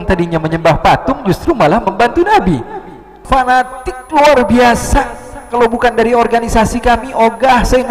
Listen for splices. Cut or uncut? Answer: cut